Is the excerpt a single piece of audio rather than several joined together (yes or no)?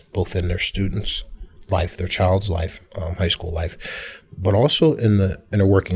yes